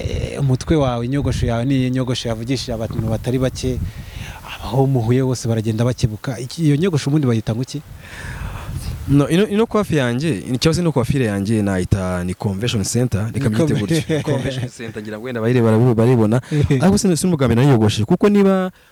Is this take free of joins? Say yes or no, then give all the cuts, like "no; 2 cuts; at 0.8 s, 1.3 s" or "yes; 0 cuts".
yes; 0 cuts